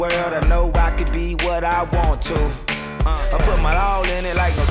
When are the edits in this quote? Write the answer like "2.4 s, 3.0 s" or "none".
none